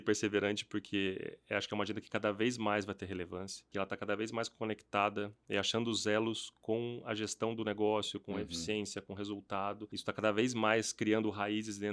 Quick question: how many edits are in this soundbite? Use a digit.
2